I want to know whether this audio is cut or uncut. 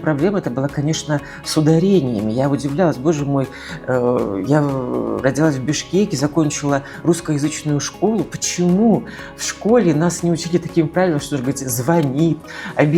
uncut